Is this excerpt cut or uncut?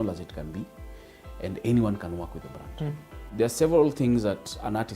cut